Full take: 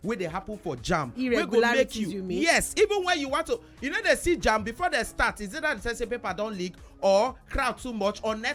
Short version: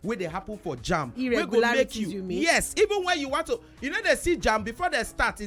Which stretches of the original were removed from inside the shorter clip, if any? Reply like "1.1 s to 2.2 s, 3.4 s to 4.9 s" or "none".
none